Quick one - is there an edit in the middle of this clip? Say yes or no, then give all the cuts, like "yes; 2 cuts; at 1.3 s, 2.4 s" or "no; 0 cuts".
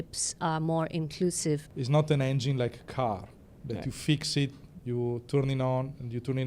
yes; 1 cut; at 1.7 s